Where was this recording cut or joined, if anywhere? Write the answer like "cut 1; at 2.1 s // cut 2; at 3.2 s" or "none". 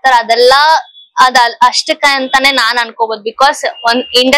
none